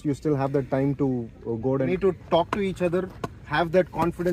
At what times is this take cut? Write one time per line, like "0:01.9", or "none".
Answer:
0:01.9